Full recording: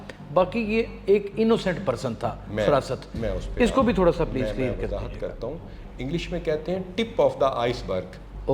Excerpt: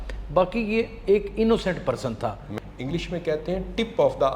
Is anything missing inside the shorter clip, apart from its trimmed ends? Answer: yes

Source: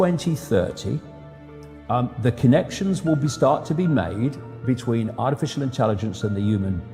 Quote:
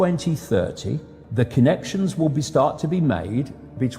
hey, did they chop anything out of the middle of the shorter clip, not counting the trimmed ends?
yes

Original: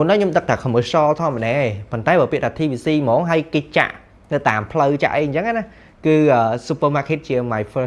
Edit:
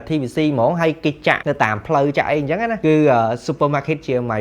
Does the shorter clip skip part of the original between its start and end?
yes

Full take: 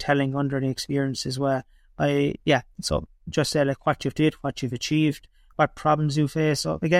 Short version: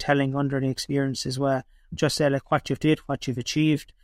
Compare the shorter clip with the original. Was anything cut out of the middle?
yes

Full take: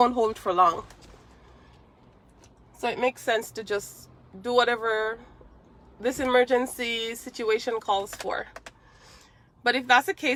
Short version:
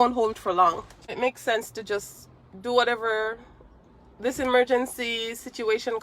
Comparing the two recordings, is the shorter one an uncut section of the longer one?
no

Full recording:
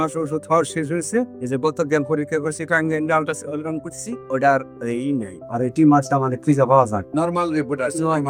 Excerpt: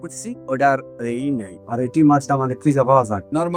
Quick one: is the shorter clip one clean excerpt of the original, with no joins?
yes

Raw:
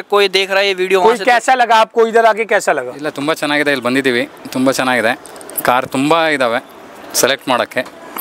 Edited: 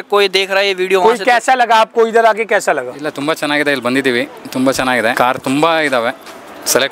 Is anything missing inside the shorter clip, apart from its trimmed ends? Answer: yes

